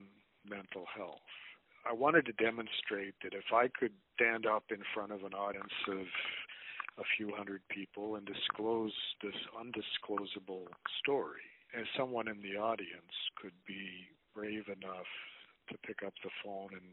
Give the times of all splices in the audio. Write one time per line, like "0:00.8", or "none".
0:01.7

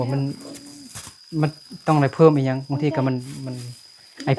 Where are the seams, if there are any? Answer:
none

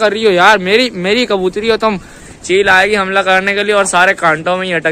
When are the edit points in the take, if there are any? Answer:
0:02.2

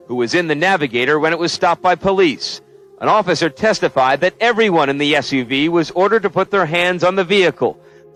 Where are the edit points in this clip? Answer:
none

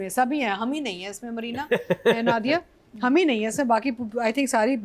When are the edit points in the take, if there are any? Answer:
none

